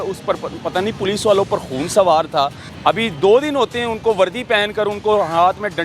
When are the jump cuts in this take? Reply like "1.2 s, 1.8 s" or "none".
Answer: 2.6 s